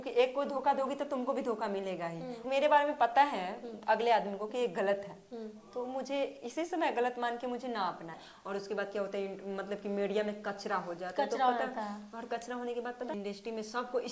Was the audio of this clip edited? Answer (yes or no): yes